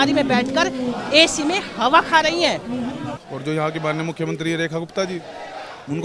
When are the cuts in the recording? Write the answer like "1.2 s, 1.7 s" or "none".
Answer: 3.1 s